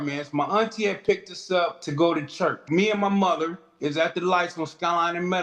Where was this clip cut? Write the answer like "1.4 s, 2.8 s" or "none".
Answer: 1.8 s, 2.7 s